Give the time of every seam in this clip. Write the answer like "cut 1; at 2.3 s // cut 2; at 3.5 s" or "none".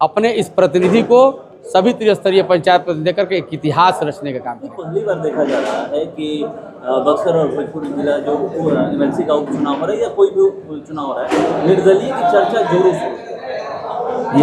none